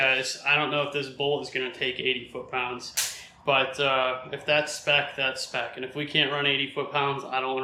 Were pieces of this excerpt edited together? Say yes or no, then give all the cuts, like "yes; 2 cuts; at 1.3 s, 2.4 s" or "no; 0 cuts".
no; 0 cuts